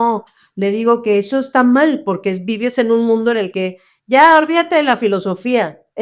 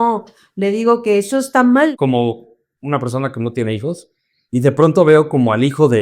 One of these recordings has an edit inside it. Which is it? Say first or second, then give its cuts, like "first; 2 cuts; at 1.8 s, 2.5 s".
second; 1 cut; at 1.9 s